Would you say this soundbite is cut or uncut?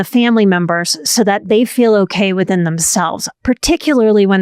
uncut